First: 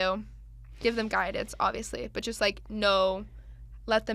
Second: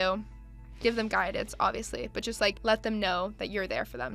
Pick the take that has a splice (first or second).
second